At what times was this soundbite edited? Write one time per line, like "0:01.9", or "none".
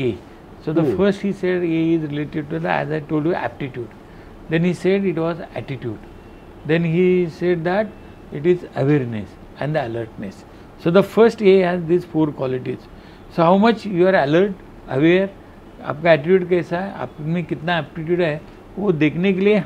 none